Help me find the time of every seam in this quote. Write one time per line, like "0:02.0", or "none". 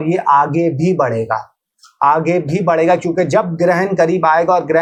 none